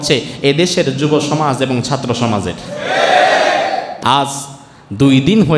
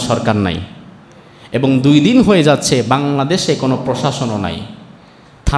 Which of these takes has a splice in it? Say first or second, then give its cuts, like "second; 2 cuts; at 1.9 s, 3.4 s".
first; 1 cut; at 3.9 s